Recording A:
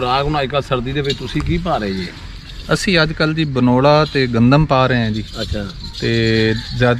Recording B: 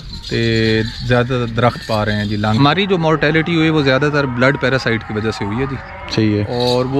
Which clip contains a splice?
B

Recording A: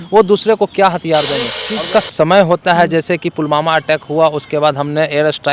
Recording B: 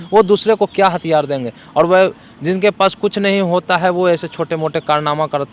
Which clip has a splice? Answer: A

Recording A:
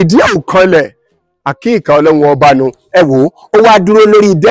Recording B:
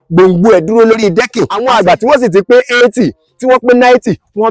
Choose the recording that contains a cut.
B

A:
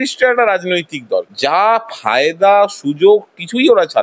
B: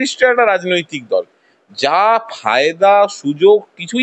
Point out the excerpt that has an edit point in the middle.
A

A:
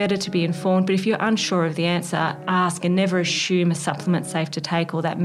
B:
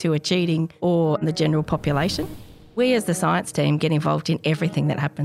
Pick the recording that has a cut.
B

